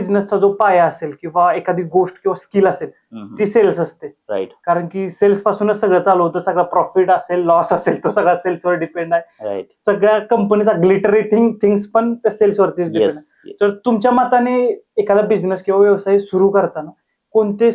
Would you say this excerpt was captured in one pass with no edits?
yes; 0 cuts

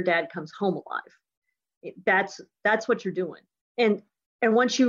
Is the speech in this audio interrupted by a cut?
yes; 1 cut; at 3.9 s

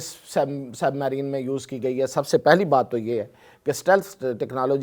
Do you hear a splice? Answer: no; 0 cuts

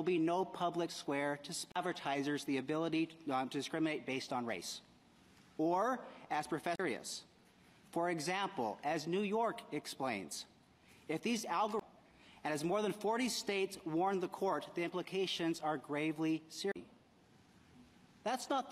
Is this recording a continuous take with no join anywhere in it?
yes; 0 cuts

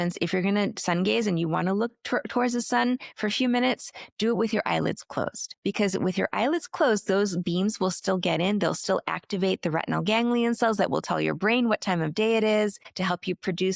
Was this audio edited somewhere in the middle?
yes; 2 cuts; at 5.4 s, 12.8 s

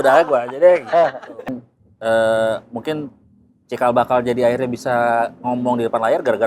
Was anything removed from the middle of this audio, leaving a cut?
yes; 1 cut; at 1.5 s

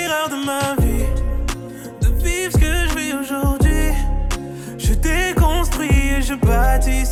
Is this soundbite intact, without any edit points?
yes; 0 cuts

